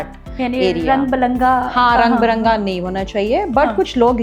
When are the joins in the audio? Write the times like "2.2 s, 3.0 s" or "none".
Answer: none